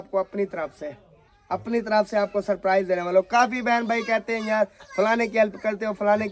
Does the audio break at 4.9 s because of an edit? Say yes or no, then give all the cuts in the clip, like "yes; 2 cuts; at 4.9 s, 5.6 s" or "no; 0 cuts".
no; 0 cuts